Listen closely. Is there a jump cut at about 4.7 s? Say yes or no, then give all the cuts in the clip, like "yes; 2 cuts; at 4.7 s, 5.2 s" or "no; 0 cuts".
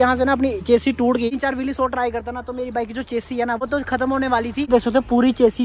yes; 2 cuts; at 1.3 s, 4.7 s